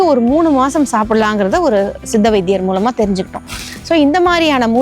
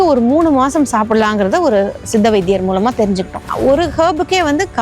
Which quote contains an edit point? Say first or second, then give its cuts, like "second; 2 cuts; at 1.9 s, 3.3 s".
second; 1 cut; at 3.4 s